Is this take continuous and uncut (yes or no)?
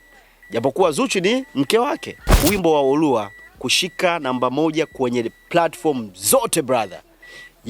no